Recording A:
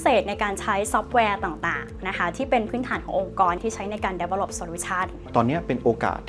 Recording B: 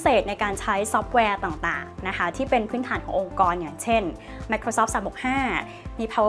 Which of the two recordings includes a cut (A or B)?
A